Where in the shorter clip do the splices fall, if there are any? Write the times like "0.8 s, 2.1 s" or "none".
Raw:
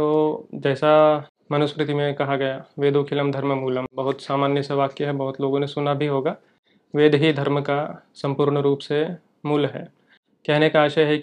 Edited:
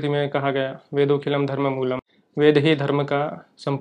2.0 s